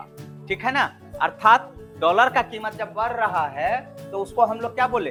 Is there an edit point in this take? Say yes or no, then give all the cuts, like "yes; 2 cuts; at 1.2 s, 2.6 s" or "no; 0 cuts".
no; 0 cuts